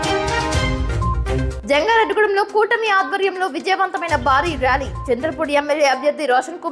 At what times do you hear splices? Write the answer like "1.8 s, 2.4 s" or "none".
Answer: none